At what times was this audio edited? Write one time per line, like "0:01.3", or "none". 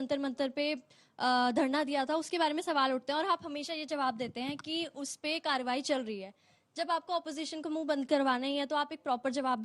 none